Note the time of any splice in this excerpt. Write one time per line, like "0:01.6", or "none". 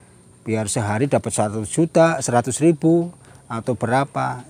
none